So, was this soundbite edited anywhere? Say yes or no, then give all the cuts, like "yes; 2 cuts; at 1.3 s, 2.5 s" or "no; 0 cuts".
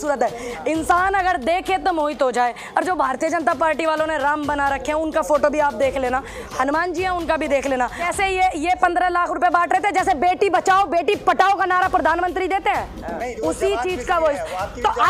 yes; 1 cut; at 8.1 s